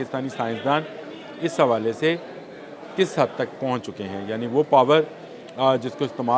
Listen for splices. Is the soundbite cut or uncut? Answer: uncut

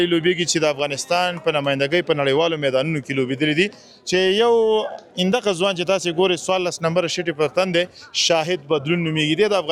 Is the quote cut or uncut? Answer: uncut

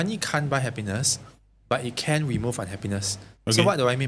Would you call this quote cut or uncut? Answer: uncut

